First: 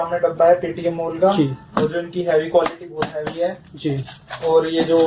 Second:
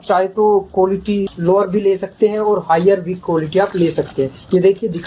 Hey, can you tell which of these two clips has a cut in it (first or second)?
second